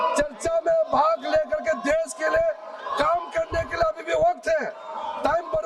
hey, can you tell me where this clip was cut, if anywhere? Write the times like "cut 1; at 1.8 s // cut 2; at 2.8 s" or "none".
none